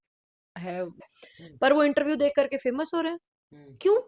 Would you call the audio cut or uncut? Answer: cut